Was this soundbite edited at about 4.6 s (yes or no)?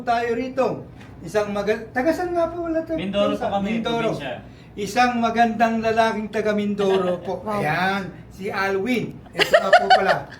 no